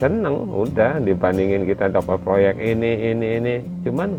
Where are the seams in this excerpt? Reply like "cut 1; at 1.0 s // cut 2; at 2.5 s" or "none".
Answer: none